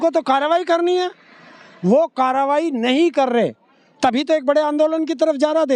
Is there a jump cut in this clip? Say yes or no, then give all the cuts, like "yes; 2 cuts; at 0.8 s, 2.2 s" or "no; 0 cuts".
no; 0 cuts